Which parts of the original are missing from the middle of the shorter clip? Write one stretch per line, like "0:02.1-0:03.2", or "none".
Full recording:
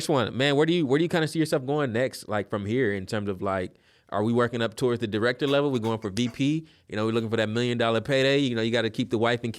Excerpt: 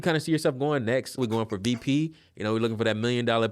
0:02.3-0:05.7